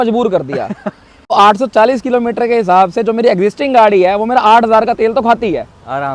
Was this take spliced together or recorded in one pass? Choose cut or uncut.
cut